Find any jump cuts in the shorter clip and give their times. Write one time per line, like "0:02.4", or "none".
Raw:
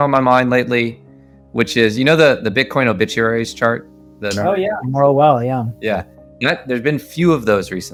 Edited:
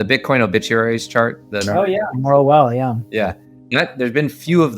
0:01.5